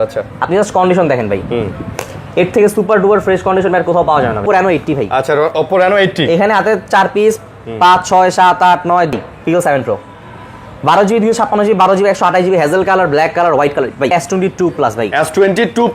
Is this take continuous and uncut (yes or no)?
no